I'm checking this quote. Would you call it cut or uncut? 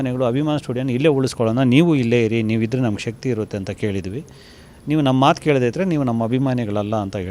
uncut